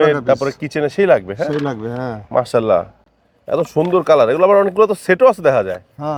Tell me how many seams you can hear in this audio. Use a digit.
0